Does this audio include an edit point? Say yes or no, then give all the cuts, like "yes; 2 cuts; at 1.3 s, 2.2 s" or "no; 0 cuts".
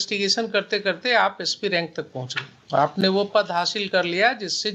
no; 0 cuts